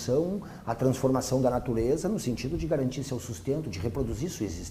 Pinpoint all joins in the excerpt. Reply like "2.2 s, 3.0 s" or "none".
2.6 s